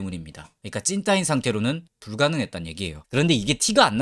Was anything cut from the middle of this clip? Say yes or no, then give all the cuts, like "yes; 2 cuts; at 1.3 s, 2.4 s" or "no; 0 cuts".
yes; 1 cut; at 3.0 s